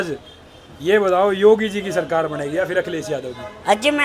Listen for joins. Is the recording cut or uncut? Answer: uncut